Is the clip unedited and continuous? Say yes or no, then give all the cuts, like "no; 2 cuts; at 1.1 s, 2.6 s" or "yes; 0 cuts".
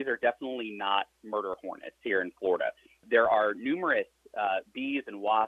no; 1 cut; at 3.0 s